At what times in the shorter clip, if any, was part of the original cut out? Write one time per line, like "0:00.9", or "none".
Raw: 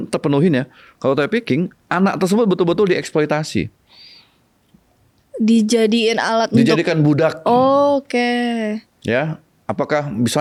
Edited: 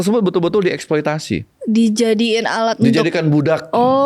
0:01.5